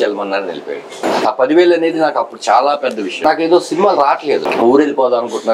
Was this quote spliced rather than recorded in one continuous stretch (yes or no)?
yes